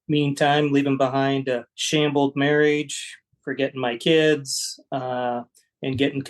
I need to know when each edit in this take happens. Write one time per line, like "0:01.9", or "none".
0:01.7